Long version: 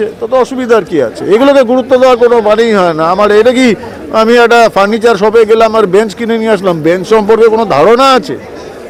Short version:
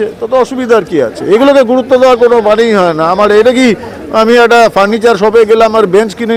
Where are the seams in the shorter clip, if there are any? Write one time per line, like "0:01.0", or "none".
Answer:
none